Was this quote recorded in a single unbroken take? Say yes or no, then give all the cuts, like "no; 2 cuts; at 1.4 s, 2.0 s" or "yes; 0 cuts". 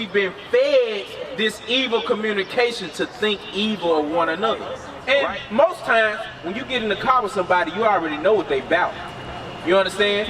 no; 1 cut; at 4.9 s